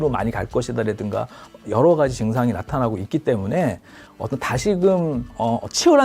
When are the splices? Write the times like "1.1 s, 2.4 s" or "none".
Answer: 4.0 s